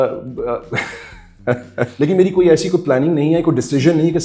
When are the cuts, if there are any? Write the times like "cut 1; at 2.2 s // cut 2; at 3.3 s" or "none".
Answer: cut 1; at 1.9 s